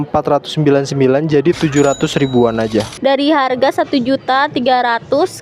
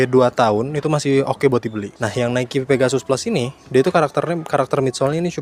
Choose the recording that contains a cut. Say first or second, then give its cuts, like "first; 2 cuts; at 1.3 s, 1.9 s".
first; 1 cut; at 2.9 s